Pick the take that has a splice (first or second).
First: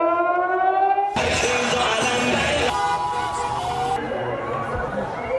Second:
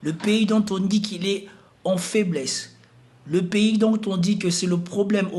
first